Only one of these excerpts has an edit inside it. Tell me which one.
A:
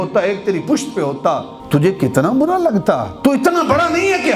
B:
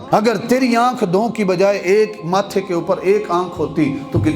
A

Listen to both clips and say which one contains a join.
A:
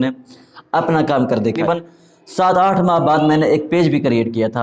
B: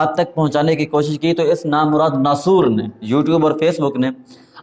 A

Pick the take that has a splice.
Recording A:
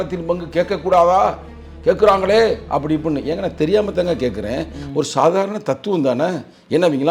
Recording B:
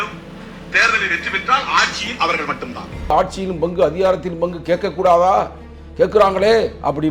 B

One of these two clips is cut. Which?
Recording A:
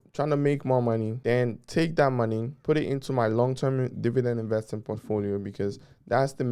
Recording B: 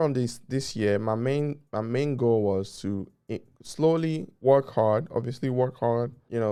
A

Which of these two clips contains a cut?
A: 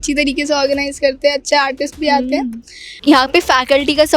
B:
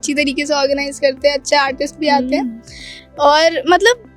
A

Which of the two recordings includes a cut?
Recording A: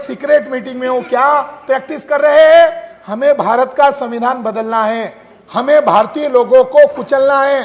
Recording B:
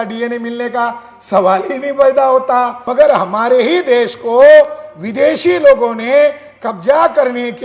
B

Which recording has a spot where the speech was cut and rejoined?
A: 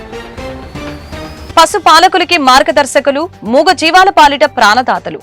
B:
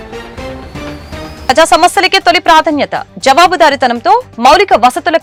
A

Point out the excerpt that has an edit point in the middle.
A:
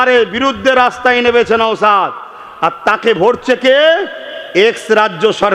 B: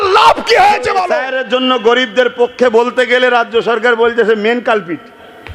B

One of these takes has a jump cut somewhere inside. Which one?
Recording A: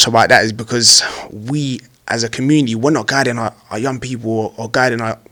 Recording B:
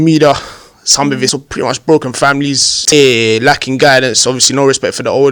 B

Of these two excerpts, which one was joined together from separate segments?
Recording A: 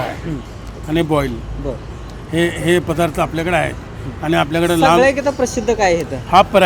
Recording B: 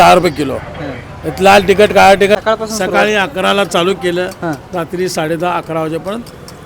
B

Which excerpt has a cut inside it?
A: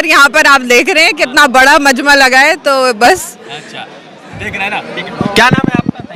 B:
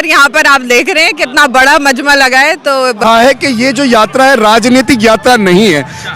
B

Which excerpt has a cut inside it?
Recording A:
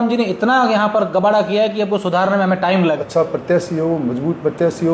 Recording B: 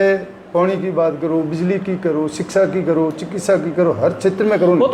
A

